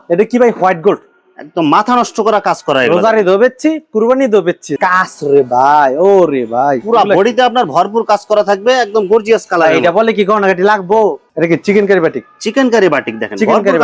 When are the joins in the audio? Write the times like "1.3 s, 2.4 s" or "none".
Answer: 4.7 s, 11.2 s